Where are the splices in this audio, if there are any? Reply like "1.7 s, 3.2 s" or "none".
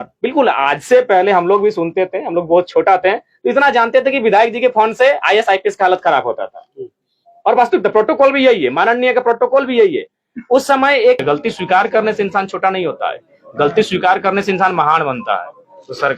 11.2 s